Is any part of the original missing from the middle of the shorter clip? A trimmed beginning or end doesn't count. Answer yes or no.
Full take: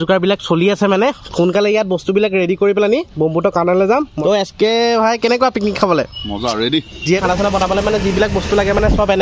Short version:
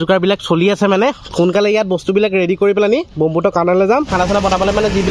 yes